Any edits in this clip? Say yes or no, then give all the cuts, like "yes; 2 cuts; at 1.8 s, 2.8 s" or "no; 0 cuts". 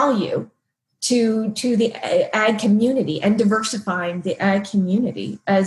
no; 0 cuts